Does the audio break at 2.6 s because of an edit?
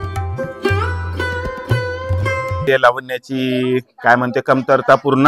yes; 1 cut; at 2.6 s

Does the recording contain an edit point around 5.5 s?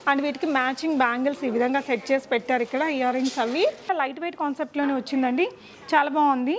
no; 1 cut; at 3.9 s

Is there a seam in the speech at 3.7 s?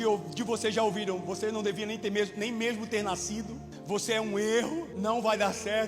yes; 2 cuts; at 3.7 s, 4.9 s

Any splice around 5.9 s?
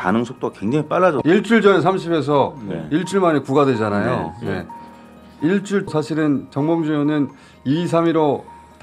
yes; 2 cuts; at 1.2 s, 5.9 s

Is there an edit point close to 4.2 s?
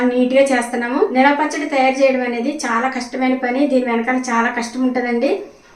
no; 1 cut; at 1.1 s

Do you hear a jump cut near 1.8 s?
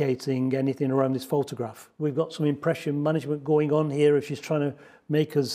yes; 1 cut; at 1.8 s

